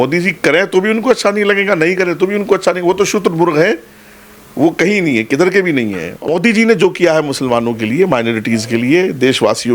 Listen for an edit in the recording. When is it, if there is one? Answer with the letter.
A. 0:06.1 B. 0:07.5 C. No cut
A